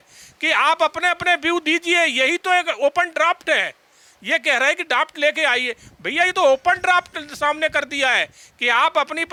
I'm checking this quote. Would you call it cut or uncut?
uncut